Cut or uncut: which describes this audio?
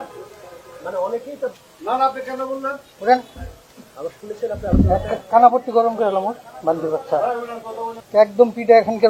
cut